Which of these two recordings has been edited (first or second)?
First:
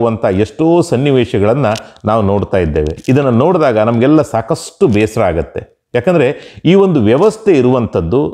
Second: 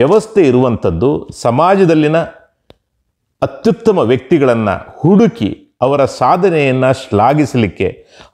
first